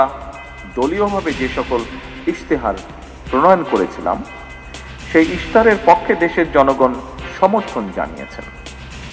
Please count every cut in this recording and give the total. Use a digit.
0